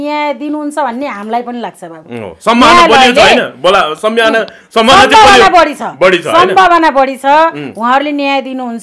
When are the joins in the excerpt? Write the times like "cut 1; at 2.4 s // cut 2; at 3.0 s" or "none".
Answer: none